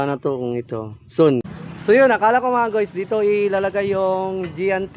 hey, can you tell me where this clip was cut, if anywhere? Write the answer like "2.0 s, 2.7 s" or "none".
1.6 s